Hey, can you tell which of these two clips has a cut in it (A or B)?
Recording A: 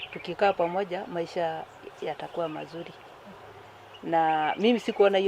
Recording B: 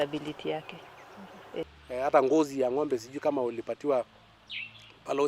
B